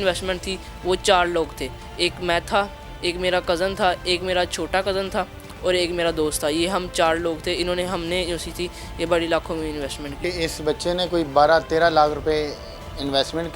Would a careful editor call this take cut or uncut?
cut